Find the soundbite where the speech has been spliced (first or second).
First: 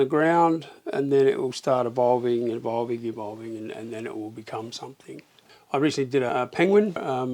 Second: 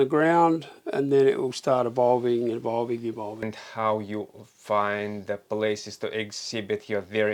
second